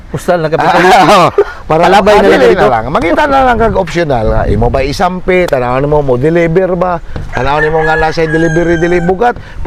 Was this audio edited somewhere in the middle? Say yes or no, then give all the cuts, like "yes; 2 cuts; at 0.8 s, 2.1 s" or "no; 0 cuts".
no; 0 cuts